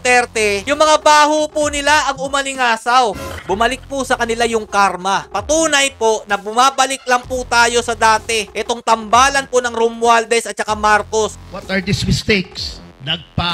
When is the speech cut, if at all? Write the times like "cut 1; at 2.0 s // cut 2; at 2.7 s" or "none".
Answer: cut 1; at 3.3 s // cut 2; at 5.3 s // cut 3; at 8.5 s // cut 4; at 11.3 s